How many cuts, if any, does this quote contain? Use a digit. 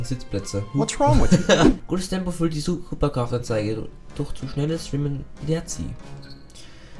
1